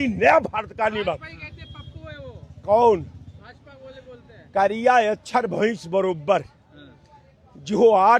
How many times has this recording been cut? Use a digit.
0